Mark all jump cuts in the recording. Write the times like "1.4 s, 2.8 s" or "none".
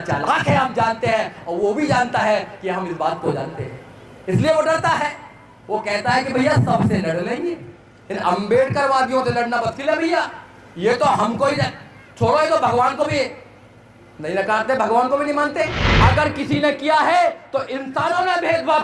15.8 s